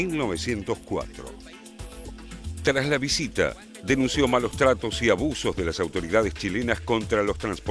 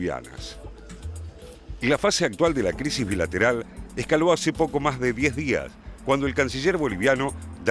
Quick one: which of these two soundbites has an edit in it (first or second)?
second